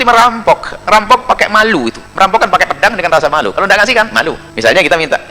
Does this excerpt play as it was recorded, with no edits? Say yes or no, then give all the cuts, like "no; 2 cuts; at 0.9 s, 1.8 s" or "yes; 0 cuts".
no; 2 cuts; at 2.0 s, 4.5 s